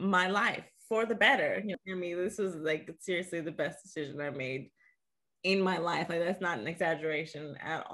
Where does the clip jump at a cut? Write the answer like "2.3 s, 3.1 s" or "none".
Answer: 1.8 s